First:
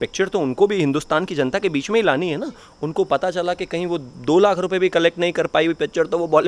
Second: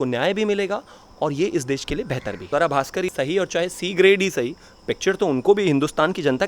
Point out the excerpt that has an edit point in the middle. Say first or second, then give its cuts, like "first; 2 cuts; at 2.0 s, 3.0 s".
second; 2 cuts; at 2.4 s, 3.1 s